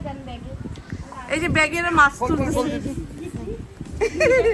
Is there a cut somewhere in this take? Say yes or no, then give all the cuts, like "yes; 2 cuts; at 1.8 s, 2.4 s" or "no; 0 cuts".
no; 0 cuts